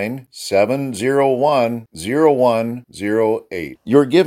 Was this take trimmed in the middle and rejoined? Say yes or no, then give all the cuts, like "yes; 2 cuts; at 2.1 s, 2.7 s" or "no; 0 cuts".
no; 0 cuts